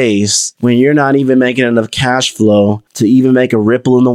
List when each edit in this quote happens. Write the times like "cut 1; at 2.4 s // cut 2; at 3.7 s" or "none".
cut 1; at 2.8 s